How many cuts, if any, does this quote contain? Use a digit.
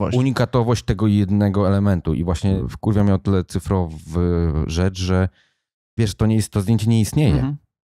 1